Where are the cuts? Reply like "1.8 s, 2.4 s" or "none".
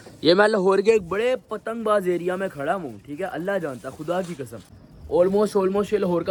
none